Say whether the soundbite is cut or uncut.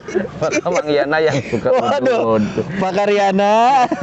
uncut